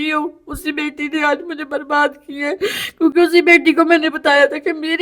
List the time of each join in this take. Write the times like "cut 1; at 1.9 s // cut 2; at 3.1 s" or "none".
none